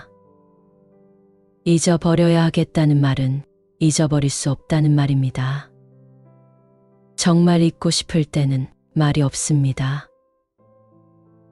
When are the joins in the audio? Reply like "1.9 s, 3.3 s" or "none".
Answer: 5.7 s, 7.1 s